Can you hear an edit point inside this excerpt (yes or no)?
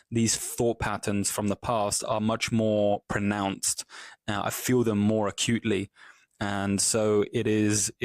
no